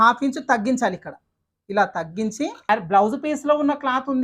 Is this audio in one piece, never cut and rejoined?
no; 1 cut; at 2.6 s

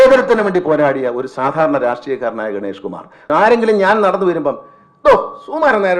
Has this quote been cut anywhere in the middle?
yes; 1 cut; at 3.2 s

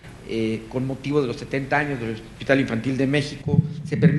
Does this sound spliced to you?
no; 0 cuts

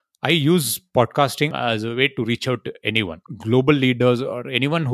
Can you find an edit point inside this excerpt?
yes; 2 cuts; at 1.5 s, 3.1 s

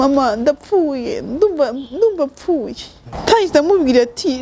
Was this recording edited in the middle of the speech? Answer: yes; 1 cut; at 3.1 s

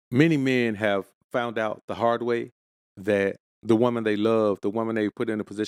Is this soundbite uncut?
yes; 0 cuts

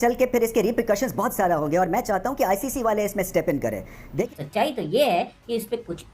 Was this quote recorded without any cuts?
no; 1 cut; at 4.2 s

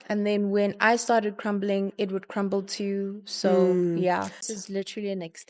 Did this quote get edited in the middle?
yes; 1 cut; at 4.4 s

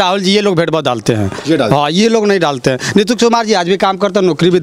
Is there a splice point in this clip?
no; 0 cuts

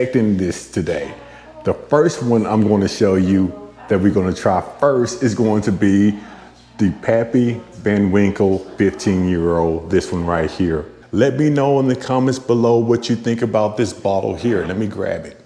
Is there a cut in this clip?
yes; 1 cut; at 10.9 s

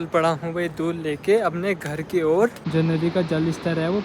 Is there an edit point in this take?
yes; 1 cut; at 2.5 s

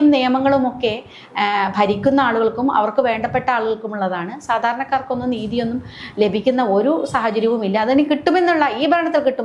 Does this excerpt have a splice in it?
no; 0 cuts

